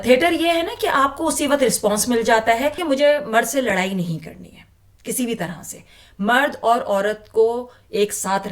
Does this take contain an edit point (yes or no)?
yes